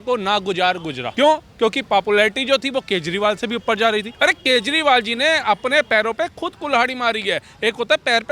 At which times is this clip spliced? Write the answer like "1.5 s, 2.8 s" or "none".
1.0 s, 4.1 s